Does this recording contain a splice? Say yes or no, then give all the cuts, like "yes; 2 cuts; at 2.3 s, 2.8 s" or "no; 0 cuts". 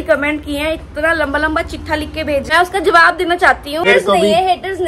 yes; 2 cuts; at 2.4 s, 3.8 s